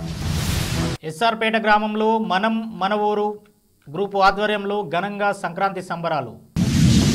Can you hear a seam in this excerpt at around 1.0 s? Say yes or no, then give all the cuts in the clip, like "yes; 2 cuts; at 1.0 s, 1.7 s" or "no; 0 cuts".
yes; 1 cut; at 1.0 s